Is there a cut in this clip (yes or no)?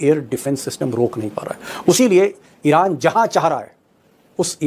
yes